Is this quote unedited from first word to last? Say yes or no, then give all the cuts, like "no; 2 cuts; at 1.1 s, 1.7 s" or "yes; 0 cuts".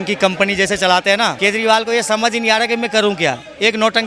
no; 1 cut; at 1.4 s